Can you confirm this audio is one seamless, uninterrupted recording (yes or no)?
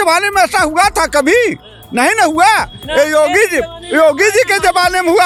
yes